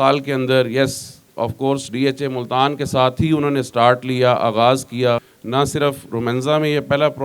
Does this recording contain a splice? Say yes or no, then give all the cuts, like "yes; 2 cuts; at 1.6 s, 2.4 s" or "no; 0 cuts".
yes; 1 cut; at 5.3 s